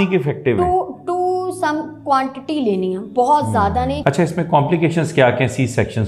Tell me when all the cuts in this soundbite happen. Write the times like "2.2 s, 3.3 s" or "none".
4.0 s